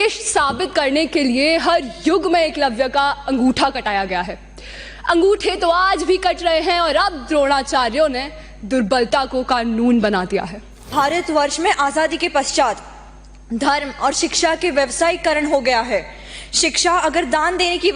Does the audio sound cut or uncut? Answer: cut